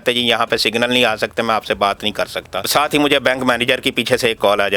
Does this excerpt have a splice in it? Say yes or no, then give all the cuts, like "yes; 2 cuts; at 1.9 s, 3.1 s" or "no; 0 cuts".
yes; 1 cut; at 2.6 s